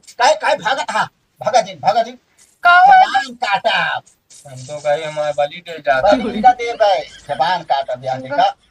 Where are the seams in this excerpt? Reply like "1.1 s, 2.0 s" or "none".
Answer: none